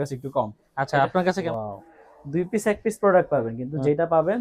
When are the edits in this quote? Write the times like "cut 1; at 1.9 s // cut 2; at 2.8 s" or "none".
cut 1; at 1.5 s